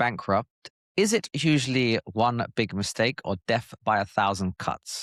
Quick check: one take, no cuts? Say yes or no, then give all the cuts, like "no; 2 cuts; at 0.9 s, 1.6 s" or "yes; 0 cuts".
yes; 0 cuts